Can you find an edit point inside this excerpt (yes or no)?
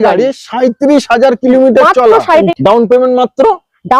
yes